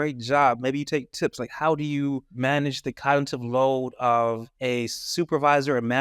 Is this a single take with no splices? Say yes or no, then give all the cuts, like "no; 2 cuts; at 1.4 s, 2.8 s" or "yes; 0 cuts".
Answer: no; 2 cuts; at 2.3 s, 4.5 s